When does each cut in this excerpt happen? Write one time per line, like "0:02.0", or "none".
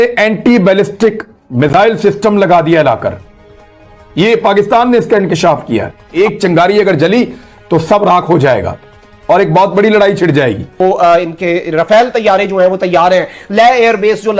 0:06.0
0:10.7